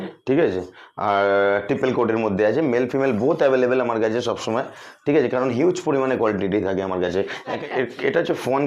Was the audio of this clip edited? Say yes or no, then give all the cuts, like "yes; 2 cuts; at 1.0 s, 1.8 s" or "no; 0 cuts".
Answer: yes; 1 cut; at 7.6 s